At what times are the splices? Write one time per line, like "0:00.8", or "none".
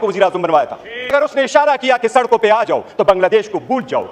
0:01.1